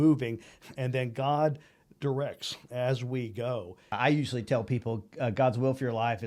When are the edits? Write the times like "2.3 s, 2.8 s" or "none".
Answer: 3.9 s